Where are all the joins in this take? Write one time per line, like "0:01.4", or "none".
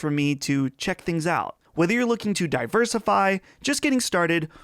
0:01.6

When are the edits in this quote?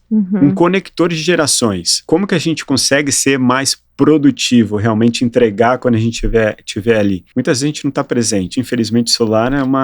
0:02.1
0:07.2

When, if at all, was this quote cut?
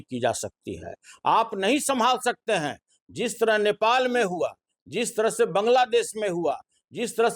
none

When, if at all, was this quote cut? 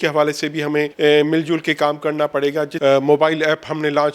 0:00.9
0:02.7

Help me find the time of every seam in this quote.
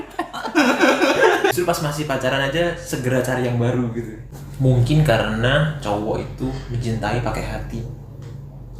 0:01.5
0:04.2

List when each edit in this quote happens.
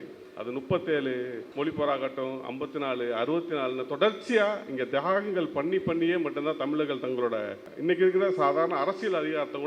0:01.4
0:07.6

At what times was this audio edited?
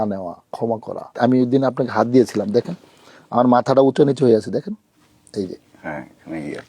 0:01.1

